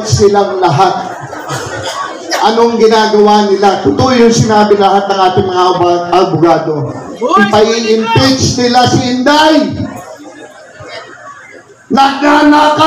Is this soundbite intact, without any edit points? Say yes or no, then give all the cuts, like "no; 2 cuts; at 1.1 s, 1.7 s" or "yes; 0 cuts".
yes; 0 cuts